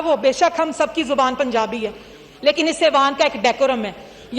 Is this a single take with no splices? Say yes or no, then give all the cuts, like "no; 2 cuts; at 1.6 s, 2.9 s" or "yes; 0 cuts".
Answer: yes; 0 cuts